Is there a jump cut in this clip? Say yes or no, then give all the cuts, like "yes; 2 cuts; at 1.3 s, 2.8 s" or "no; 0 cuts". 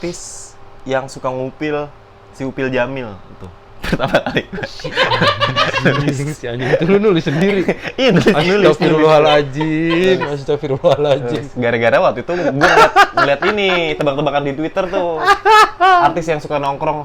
no; 0 cuts